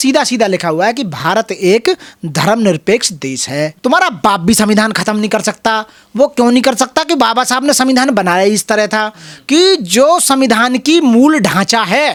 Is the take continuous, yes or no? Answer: yes